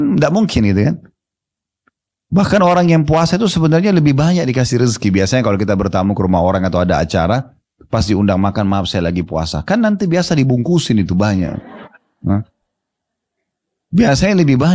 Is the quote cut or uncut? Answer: uncut